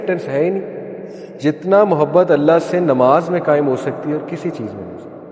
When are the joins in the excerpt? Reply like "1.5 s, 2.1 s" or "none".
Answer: 1.4 s